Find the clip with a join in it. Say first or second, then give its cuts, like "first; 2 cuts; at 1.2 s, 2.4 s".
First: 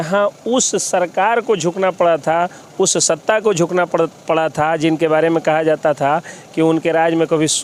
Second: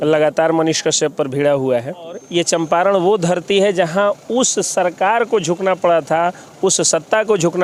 second; 1 cut; at 2.2 s